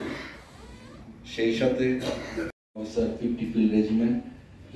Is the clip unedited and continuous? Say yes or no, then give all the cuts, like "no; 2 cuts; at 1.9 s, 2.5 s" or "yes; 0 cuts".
no; 1 cut; at 2.6 s